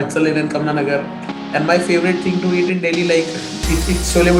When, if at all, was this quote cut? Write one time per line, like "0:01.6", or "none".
none